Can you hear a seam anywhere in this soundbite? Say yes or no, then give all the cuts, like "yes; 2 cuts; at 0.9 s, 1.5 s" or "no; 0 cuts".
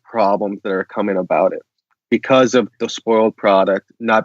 yes; 1 cut; at 2.9 s